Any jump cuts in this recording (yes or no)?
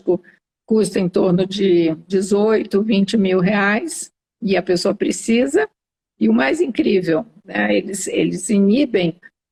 no